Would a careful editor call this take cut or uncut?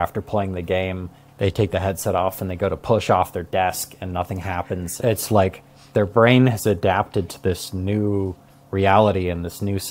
uncut